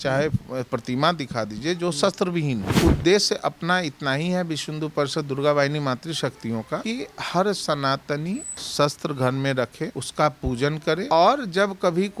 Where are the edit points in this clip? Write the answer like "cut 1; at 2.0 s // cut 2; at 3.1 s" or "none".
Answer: cut 1; at 2.7 s // cut 2; at 6.8 s // cut 3; at 8.6 s // cut 4; at 10.0 s // cut 5; at 11.0 s